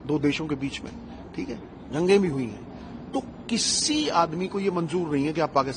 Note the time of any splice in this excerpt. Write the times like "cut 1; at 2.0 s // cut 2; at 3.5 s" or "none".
none